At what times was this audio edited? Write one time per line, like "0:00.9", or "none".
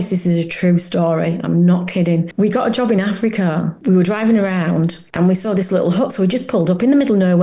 0:02.3
0:03.8
0:05.0